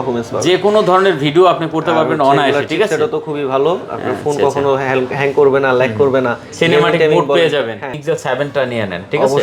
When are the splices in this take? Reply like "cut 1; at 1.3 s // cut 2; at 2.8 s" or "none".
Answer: cut 1; at 7.9 s

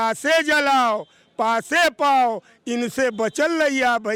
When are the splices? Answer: none

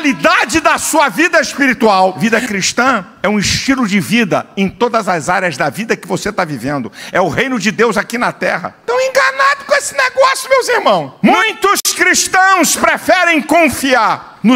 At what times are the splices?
cut 1; at 2.2 s // cut 2; at 11.1 s

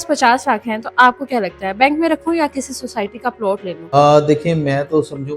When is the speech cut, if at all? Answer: cut 1; at 3.9 s

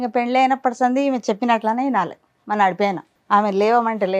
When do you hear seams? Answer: cut 1; at 3.1 s

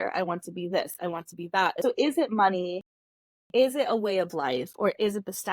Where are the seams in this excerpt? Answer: cut 1; at 1.8 s

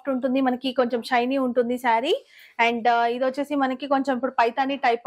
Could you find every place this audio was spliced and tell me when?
none

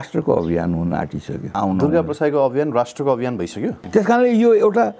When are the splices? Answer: cut 1; at 1.6 s // cut 2; at 3.8 s

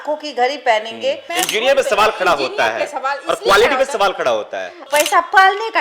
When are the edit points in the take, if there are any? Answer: cut 1; at 1.3 s // cut 2; at 4.8 s

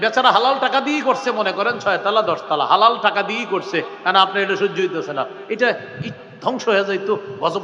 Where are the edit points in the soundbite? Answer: none

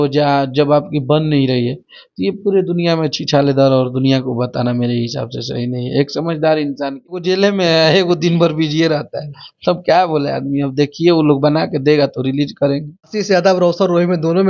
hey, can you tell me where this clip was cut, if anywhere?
cut 1; at 7.2 s // cut 2; at 13.5 s

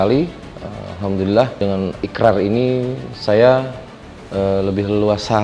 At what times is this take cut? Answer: cut 1; at 1.6 s

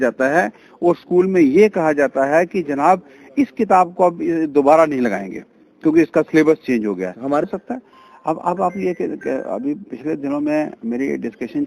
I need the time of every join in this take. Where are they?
cut 1; at 7.4 s

